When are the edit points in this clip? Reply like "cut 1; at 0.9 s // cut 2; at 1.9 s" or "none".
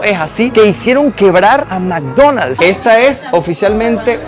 cut 1; at 1.7 s // cut 2; at 2.5 s